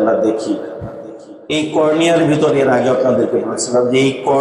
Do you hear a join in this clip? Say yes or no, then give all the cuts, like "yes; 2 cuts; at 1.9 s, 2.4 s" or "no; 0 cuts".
no; 0 cuts